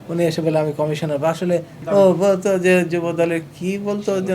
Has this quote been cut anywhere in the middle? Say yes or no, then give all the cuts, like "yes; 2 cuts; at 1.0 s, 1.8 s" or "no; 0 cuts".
yes; 1 cut; at 1.7 s